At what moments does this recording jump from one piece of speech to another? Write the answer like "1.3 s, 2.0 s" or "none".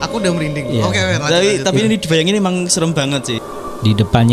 3.4 s